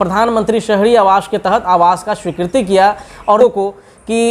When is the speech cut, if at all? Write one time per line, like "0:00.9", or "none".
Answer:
0:03.4